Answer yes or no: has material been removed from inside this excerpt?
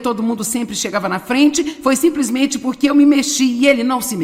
no